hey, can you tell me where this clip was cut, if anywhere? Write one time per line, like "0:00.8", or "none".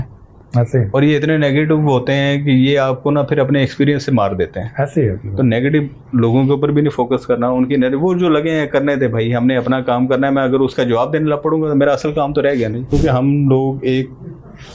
0:12.9